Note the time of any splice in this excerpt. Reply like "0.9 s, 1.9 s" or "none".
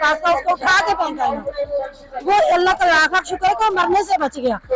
none